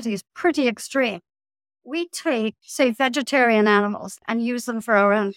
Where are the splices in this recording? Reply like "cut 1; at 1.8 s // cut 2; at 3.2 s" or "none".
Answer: cut 1; at 2.6 s // cut 2; at 4.2 s